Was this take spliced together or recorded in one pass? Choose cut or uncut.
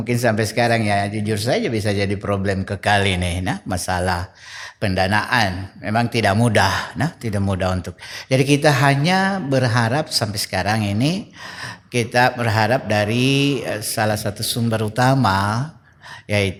uncut